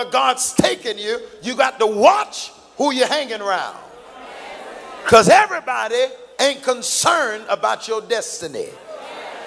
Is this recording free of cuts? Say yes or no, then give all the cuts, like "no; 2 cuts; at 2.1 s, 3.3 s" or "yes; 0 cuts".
yes; 0 cuts